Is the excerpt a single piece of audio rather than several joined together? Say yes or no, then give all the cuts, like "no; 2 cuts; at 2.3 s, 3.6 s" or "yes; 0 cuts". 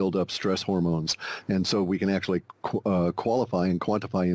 yes; 0 cuts